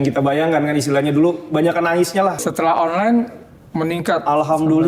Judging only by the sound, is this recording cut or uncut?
cut